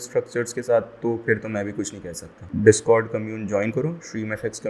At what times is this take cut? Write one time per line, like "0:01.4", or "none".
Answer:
0:02.4